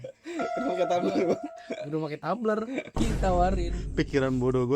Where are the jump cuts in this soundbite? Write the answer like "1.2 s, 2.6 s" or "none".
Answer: 2.9 s